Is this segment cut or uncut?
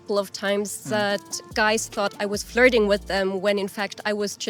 uncut